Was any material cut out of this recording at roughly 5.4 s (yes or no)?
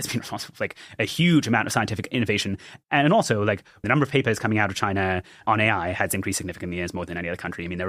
yes